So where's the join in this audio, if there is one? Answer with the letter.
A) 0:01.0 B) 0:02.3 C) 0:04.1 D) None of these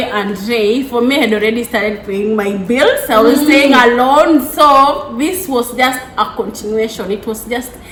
D